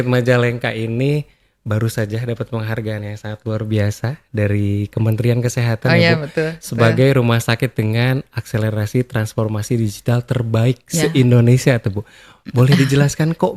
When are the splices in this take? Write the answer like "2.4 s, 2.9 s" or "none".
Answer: none